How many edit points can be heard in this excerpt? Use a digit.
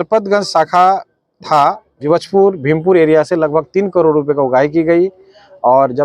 1